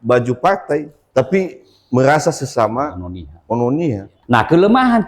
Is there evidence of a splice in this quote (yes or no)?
yes